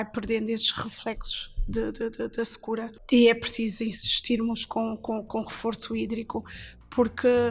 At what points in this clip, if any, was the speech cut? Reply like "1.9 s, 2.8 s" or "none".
2.9 s